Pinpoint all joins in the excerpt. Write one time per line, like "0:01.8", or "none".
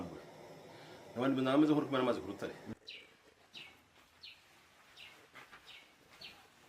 0:02.7